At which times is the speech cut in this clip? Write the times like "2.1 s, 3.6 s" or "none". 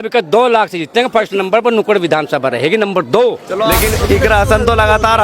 3.8 s